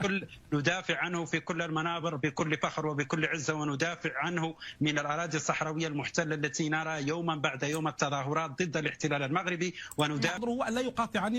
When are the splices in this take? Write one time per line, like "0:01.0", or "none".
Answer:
0:10.4